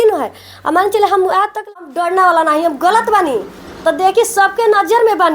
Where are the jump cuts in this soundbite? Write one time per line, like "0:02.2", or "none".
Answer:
0:01.6